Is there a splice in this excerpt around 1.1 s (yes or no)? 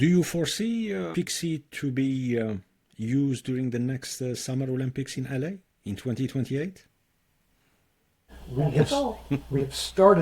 yes